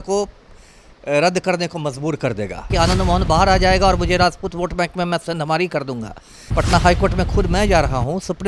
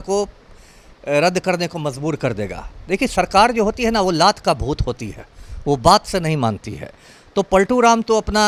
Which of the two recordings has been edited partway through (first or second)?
first